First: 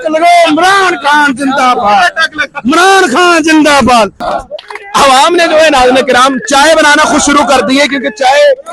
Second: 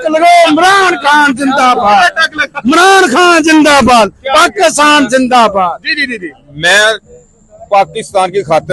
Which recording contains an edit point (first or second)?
first